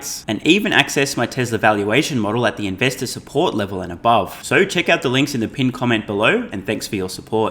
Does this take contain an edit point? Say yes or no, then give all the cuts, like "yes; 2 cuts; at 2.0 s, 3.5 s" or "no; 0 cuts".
no; 0 cuts